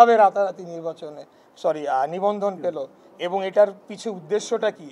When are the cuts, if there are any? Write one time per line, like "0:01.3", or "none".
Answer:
none